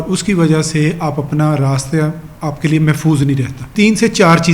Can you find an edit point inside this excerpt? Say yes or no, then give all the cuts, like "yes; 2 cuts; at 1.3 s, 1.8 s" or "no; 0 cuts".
yes; 1 cut; at 3.6 s